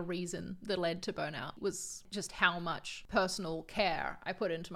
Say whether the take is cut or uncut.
cut